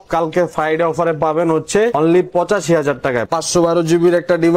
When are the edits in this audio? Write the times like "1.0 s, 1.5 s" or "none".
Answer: 1.9 s, 3.3 s